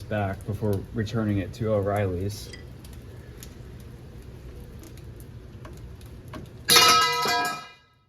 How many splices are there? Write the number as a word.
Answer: one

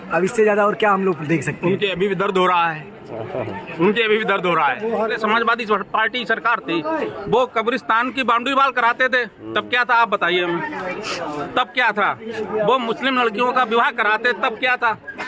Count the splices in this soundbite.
one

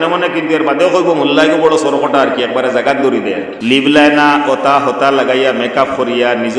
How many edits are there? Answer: one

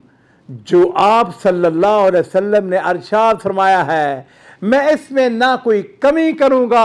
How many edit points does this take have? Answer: zero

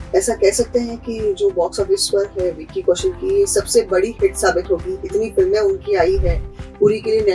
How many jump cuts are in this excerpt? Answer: zero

